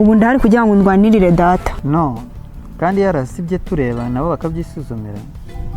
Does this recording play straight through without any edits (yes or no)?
no